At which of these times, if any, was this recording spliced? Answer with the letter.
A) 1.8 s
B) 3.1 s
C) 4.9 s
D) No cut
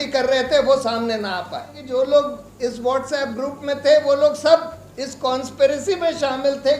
A